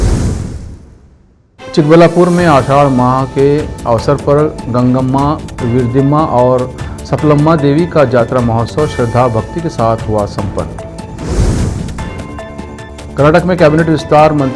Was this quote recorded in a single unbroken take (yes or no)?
no